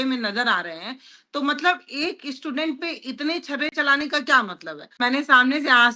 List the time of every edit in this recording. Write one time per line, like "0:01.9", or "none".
0:05.0